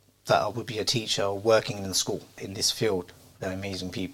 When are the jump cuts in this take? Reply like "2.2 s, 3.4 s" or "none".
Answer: 2.4 s